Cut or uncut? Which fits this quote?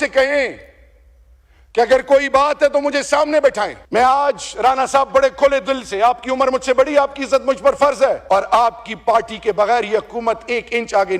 cut